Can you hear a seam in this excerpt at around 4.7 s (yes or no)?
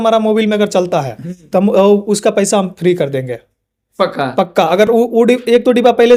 no